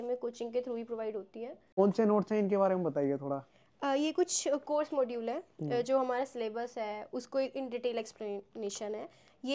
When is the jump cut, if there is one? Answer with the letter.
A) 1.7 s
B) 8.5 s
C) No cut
A